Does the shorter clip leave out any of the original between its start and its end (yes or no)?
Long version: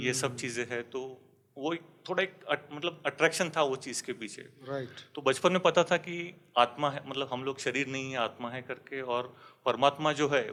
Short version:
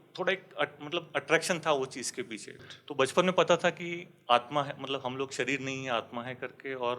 yes